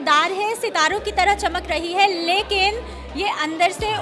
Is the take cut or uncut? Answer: uncut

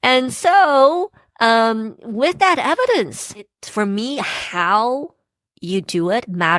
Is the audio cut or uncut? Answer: cut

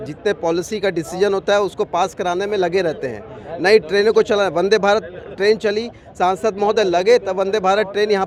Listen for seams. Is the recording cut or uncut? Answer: uncut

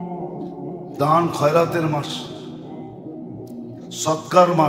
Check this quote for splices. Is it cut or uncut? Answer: cut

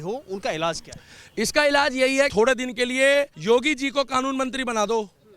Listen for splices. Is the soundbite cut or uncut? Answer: cut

